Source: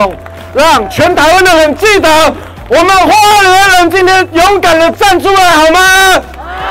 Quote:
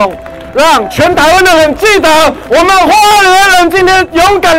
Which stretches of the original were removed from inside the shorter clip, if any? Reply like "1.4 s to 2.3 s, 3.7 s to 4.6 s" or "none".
2.4 s to 2.6 s